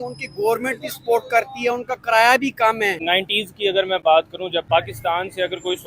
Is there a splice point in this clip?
yes; 2 cuts; at 3.0 s, 4.7 s

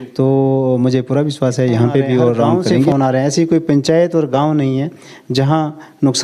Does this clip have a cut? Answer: yes; 1 cut; at 2.9 s

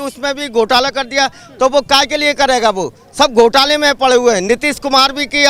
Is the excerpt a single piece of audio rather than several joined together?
yes; 0 cuts

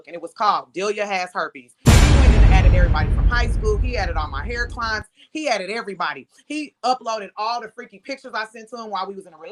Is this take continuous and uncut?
yes; 0 cuts

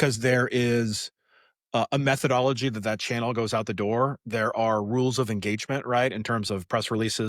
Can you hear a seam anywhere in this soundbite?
no; 0 cuts

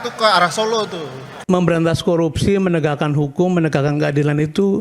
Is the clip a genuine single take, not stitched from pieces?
no; 1 cut; at 1.3 s

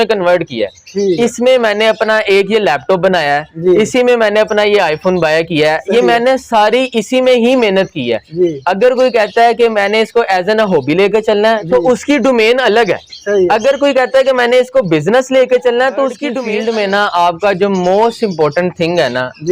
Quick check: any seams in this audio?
yes; 1 cut; at 16.3 s

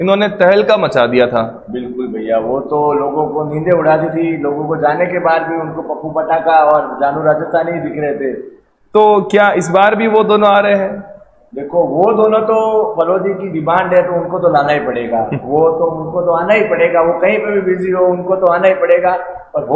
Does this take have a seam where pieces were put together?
no; 0 cuts

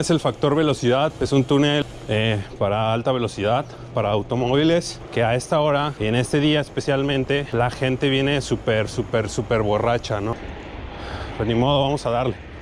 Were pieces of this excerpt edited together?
yes; 6 cuts; at 1.1 s, 1.8 s, 5.0 s, 5.9 s, 7.5 s, 10.5 s

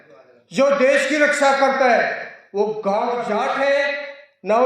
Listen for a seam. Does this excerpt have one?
yes; 1 cut; at 3.1 s

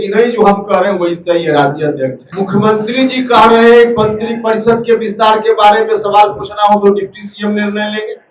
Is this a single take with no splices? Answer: no; 1 cut; at 2.2 s

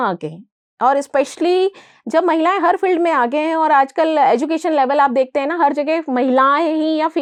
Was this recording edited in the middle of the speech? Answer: no; 0 cuts

